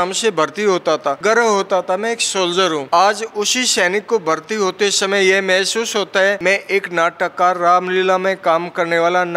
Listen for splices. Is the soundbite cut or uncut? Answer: cut